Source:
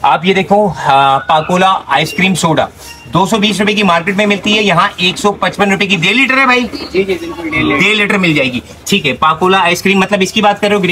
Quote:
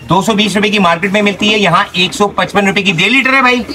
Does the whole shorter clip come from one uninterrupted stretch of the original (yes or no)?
yes